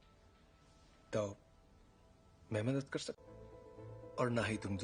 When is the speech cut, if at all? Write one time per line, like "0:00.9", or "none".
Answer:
none